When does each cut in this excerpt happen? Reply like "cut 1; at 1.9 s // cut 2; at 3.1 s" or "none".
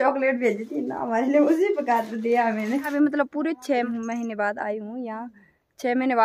cut 1; at 2.9 s // cut 2; at 3.9 s